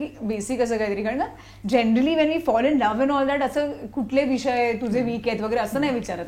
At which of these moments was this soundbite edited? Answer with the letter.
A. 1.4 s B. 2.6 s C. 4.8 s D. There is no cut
D